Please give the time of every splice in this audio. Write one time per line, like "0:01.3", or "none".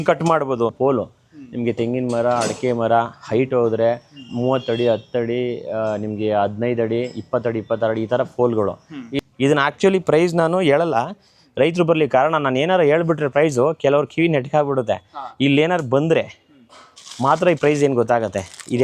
0:00.8
0:09.1